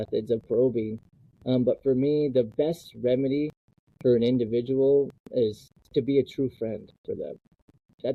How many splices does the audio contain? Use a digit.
1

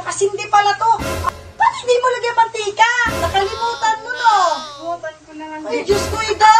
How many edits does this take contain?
1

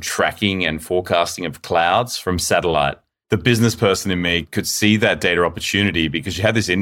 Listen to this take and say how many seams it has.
3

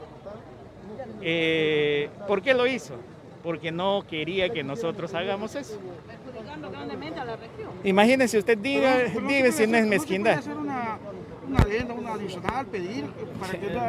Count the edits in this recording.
1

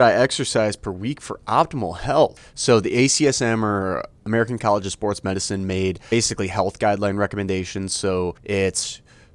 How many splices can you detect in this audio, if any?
3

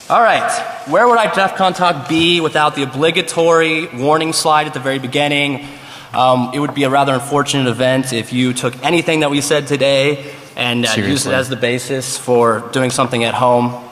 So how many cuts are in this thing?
1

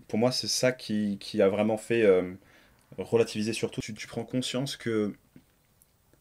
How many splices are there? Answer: 1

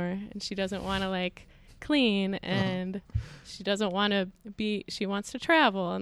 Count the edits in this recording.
0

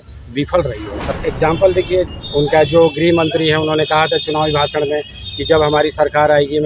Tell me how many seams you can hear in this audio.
2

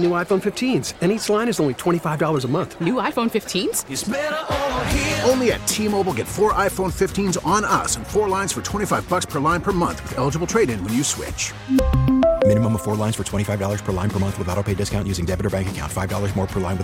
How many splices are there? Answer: 0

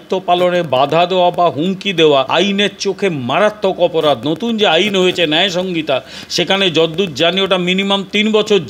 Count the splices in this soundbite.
1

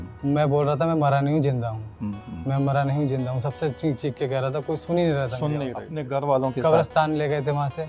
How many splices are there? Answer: 1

